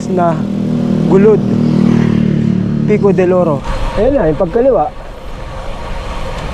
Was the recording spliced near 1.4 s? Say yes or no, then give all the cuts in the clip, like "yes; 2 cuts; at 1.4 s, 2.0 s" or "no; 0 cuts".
no; 1 cut; at 3.7 s